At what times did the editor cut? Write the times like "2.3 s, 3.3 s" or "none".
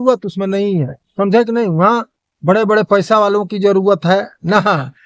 none